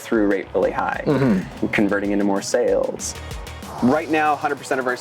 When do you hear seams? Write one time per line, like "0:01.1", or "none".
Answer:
0:03.1